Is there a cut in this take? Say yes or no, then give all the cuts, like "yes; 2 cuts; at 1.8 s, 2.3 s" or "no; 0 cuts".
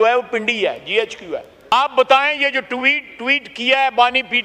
yes; 1 cut; at 1.5 s